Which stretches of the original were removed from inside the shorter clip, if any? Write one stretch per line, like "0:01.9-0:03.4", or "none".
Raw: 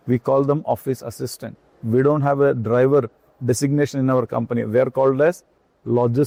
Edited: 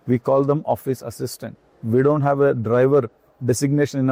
none